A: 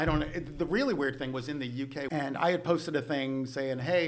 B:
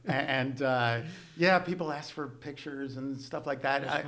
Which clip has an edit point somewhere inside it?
A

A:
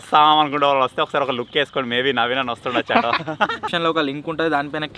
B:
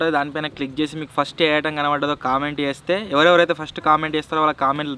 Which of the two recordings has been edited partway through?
A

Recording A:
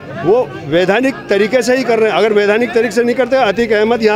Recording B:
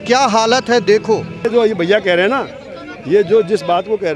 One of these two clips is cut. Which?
B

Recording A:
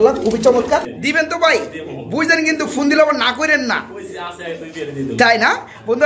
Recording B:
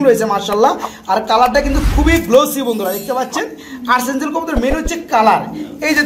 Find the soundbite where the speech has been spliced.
A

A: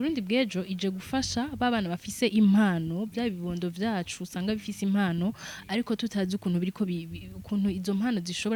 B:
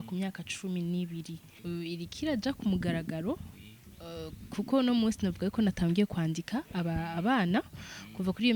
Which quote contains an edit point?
B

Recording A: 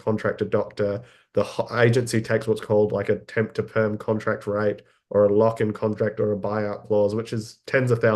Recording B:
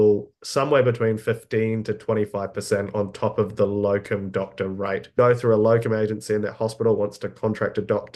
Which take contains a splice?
B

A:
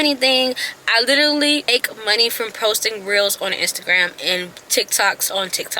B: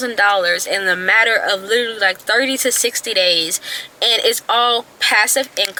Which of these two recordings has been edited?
A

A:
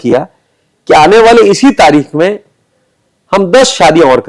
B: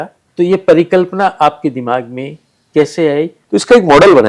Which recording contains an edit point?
B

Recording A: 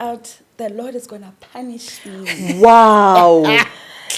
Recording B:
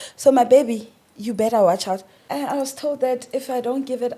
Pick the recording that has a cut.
B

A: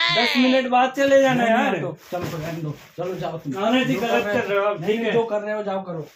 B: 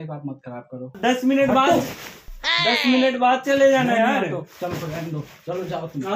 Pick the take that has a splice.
B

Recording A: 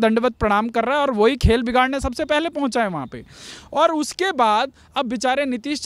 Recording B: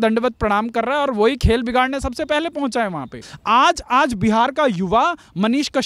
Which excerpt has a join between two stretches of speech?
B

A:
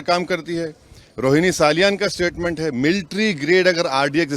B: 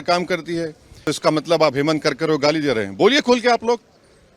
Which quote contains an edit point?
B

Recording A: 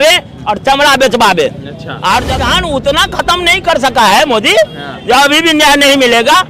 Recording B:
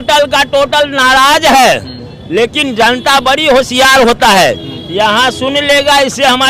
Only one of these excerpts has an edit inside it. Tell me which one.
A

